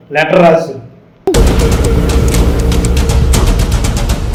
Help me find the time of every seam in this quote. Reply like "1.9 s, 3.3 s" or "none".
none